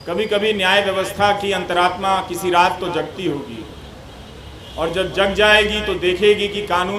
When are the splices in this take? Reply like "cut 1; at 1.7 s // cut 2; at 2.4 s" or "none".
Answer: none